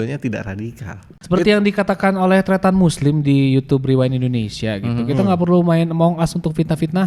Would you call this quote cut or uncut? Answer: cut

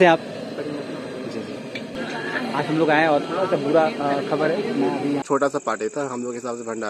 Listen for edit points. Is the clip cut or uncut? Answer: cut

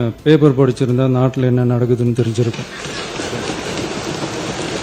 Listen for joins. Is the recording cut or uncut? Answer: uncut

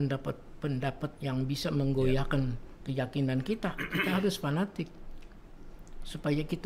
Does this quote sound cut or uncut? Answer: uncut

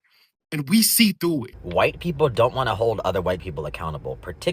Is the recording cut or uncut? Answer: cut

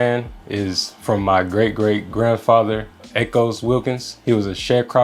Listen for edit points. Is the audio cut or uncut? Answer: uncut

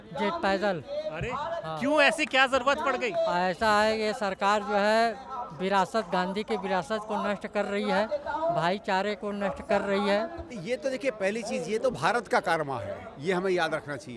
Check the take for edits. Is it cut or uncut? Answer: cut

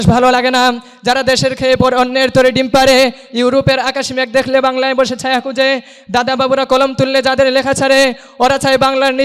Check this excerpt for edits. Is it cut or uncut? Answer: uncut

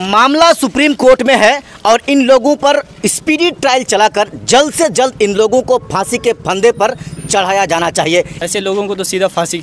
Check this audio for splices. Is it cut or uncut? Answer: cut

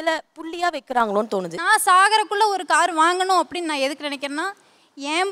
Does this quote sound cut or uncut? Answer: cut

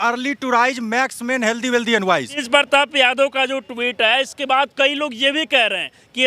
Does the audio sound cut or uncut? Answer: cut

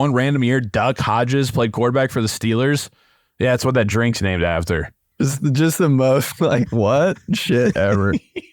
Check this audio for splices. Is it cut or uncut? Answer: cut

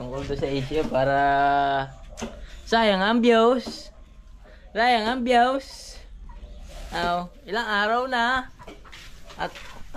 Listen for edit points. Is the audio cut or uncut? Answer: uncut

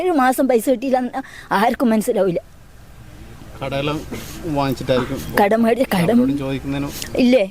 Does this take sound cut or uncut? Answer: uncut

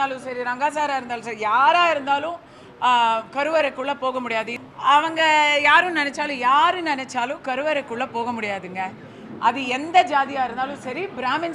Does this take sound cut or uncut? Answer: cut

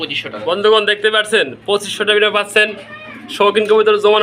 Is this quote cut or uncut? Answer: uncut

